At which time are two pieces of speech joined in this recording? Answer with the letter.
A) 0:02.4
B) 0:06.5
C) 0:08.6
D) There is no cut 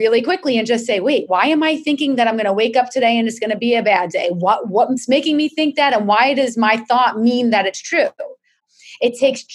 C